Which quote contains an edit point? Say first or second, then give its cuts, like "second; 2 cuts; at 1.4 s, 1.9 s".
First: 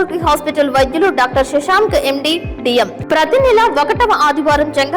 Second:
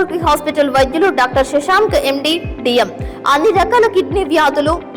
first; 1 cut; at 3.0 s